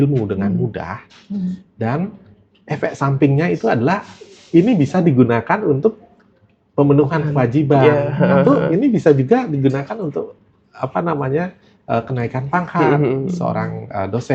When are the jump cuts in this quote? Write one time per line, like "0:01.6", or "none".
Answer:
none

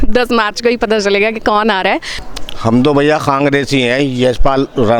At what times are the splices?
0:02.2

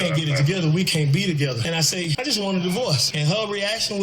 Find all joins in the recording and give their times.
0:01.8
0:03.1

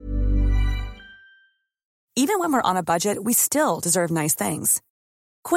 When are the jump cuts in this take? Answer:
none

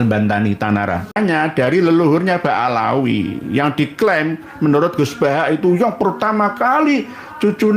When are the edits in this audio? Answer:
0:01.1

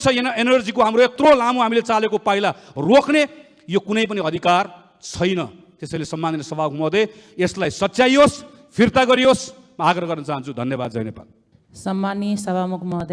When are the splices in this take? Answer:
none

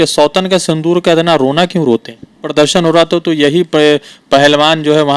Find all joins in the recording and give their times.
0:02.5

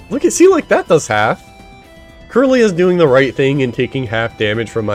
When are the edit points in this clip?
none

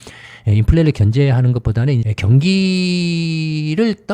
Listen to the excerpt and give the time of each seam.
0:02.0

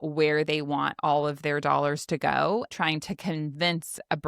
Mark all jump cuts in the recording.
0:02.7

